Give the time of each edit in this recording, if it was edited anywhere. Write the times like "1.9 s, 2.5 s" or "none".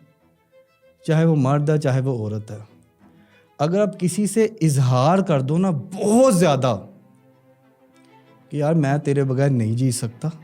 none